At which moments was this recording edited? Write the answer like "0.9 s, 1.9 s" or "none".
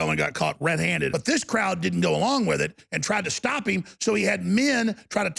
1.1 s